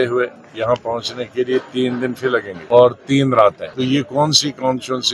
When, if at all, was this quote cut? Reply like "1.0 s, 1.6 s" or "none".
2.5 s, 3.6 s